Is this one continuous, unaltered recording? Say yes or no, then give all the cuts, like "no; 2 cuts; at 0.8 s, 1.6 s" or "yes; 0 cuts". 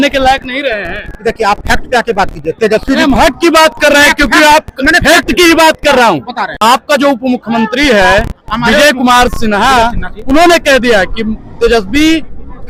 yes; 0 cuts